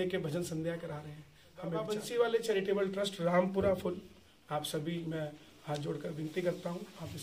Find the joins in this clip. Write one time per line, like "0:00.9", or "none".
0:01.8